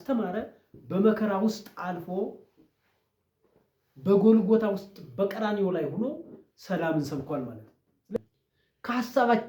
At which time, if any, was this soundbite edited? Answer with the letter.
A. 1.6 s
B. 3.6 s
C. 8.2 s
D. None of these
C